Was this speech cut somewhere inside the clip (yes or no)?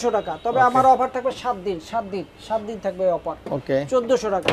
no